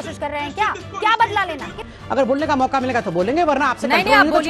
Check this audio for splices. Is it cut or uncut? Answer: cut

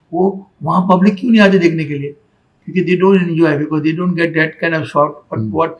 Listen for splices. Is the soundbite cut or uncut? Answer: uncut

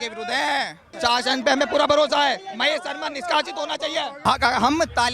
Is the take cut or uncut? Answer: cut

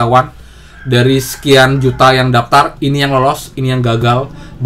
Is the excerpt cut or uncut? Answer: uncut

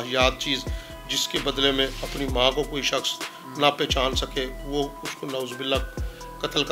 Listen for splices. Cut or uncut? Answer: uncut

